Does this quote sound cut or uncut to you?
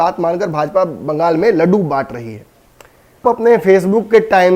cut